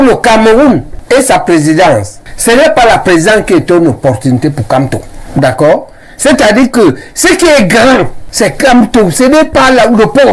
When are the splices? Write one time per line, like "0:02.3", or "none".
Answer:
0:05.2